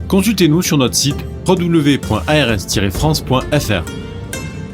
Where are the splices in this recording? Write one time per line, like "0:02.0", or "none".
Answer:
0:03.8